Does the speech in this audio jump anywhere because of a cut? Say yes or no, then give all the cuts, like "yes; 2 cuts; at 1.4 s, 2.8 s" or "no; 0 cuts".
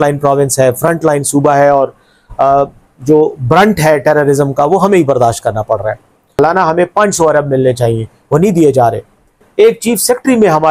yes; 2 cuts; at 6.4 s, 9.5 s